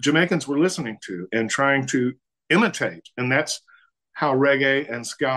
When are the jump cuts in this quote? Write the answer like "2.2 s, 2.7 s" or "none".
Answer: none